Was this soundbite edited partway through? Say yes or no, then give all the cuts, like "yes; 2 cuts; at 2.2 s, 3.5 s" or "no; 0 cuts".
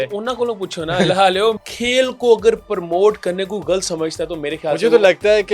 yes; 1 cut; at 1.6 s